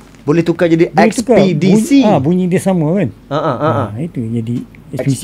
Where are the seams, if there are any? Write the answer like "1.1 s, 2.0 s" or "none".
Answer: none